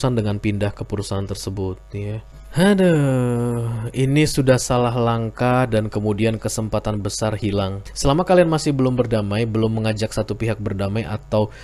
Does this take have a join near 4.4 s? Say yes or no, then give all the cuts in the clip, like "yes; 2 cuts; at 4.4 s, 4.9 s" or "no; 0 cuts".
no; 2 cuts; at 2.3 s, 7.8 s